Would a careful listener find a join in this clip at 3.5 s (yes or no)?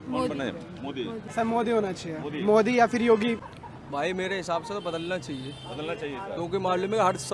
yes